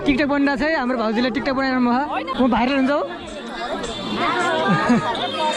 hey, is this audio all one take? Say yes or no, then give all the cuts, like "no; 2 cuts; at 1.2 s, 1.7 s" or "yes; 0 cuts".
no; 1 cut; at 2.3 s